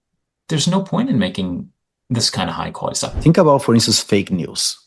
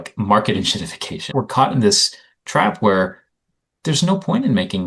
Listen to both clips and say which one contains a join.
first; 1 cut; at 3.1 s

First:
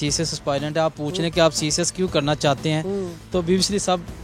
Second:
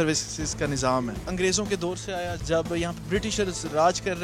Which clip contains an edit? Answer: second; 2 cuts; at 1.2 s, 2.4 s

